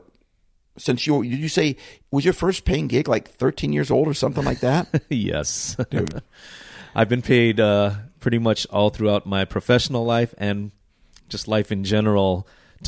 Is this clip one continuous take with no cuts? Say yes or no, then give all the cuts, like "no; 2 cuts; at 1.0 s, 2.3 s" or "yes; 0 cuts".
yes; 0 cuts